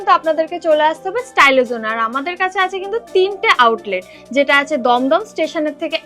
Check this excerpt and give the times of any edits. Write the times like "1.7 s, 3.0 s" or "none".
none